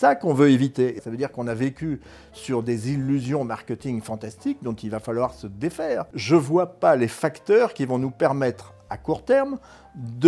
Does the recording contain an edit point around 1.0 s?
yes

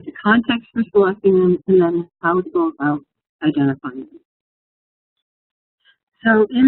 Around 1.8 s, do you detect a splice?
yes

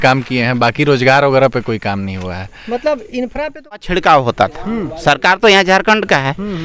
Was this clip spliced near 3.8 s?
yes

